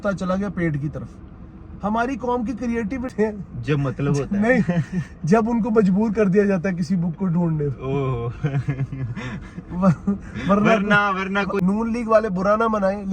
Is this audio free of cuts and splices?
no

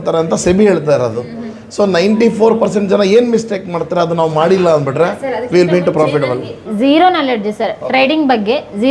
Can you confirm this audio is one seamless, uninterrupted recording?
yes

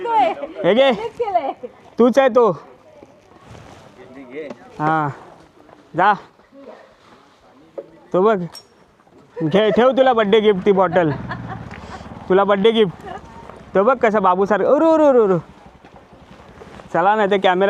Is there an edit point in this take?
no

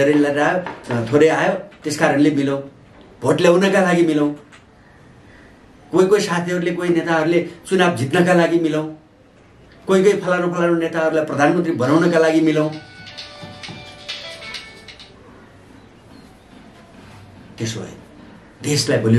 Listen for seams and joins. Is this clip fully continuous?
yes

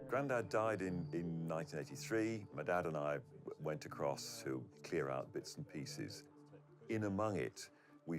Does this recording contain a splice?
yes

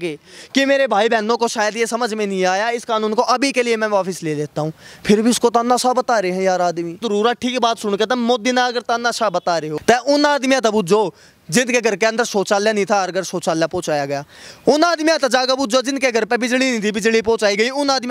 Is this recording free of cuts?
no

